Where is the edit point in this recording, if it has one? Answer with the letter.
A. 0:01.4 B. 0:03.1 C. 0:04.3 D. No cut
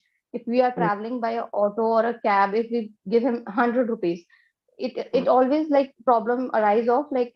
D